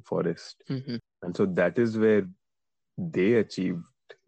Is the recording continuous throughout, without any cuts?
no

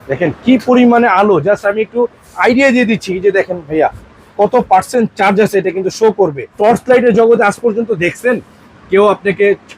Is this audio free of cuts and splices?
no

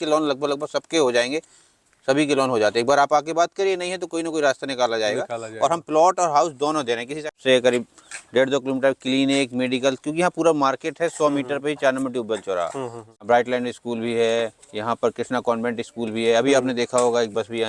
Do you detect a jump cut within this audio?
yes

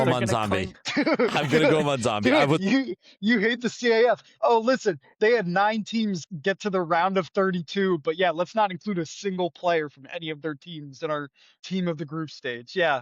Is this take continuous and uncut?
no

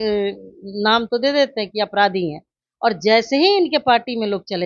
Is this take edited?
no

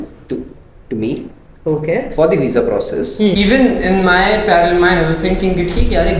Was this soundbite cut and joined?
yes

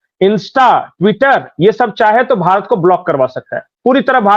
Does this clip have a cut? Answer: no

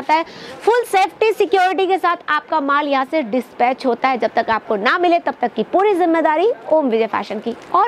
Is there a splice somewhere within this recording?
no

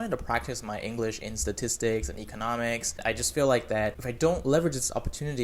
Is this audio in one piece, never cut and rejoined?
no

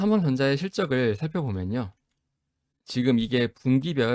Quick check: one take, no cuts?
yes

